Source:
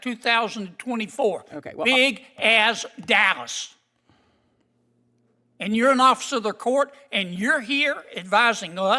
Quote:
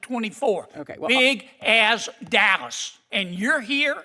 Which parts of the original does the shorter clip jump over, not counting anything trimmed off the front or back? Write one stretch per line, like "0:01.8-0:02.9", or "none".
0:03.8-0:07.0